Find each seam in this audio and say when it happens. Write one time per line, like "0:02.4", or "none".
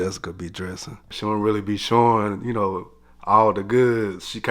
0:01.1